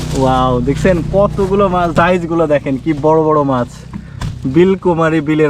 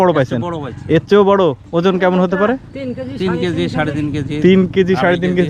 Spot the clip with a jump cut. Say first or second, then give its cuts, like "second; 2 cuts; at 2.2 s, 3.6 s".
first; 1 cut; at 1.9 s